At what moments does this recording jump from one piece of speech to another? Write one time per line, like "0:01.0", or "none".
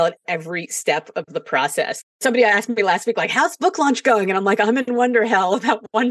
0:02.1